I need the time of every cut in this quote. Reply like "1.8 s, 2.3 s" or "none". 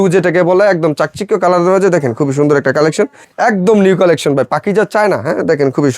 3.2 s